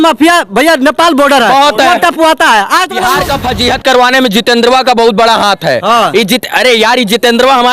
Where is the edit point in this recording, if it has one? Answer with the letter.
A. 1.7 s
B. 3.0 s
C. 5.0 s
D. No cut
B